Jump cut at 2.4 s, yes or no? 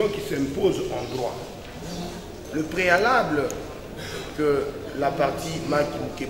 yes